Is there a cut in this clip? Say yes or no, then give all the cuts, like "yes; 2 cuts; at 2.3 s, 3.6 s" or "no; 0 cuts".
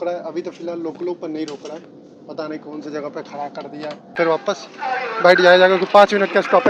yes; 1 cut; at 4.1 s